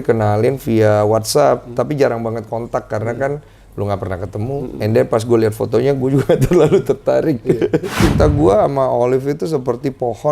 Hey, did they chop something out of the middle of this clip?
yes; 1 cut; at 8.0 s

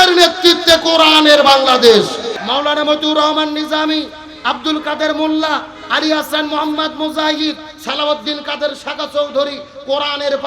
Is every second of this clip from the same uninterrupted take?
no; 1 cut; at 2.3 s

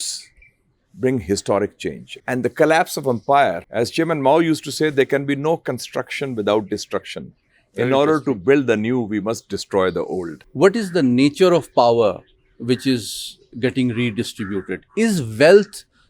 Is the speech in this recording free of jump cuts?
no; 3 cuts; at 2.1 s, 3.6 s, 10.4 s

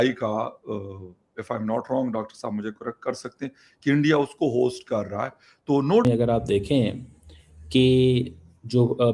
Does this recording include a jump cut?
yes; 1 cut; at 6.0 s

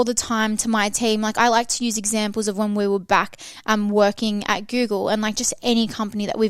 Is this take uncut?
yes; 0 cuts

